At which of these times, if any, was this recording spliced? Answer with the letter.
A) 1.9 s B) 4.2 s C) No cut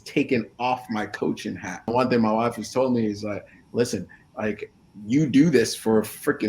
A